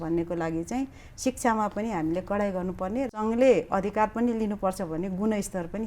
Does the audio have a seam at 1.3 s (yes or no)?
no